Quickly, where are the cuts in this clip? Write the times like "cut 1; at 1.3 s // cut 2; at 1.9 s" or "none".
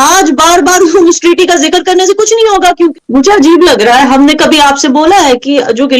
cut 1; at 2.9 s